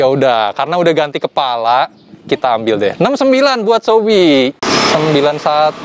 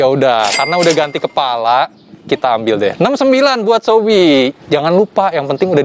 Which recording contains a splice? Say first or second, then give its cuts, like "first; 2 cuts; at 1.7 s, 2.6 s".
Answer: first; 1 cut; at 4.6 s